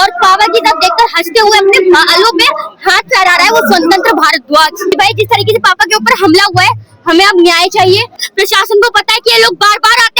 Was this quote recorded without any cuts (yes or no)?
no